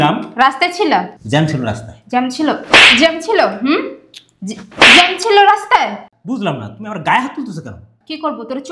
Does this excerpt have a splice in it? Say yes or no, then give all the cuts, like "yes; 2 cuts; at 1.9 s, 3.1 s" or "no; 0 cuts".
yes; 1 cut; at 1.2 s